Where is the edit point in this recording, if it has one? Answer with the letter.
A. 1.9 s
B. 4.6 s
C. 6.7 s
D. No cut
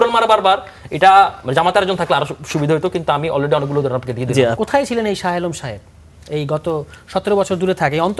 B